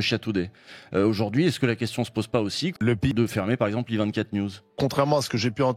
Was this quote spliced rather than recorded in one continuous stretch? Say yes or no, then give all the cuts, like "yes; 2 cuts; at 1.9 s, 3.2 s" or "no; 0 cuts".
yes; 2 cuts; at 3.1 s, 4.8 s